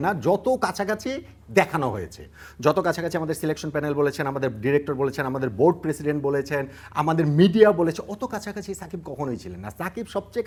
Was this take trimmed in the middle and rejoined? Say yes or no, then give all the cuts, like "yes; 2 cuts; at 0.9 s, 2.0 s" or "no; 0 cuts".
no; 0 cuts